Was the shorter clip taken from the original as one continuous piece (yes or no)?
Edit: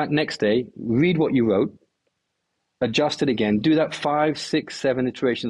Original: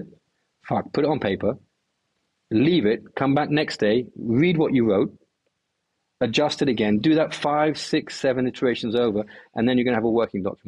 yes